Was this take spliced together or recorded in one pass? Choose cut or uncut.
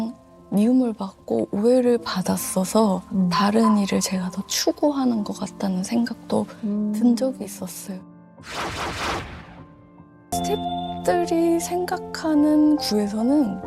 cut